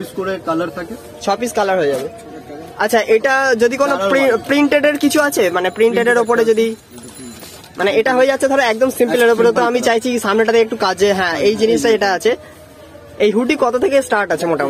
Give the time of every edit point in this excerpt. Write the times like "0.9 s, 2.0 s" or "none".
none